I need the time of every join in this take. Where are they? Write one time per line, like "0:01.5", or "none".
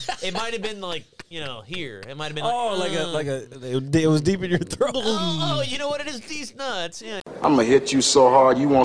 0:07.4